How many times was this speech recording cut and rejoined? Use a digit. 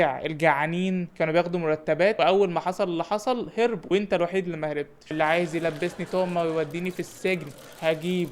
2